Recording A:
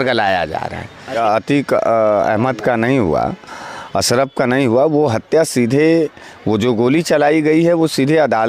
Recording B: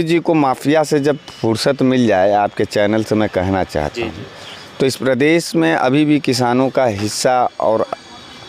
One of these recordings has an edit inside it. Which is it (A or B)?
A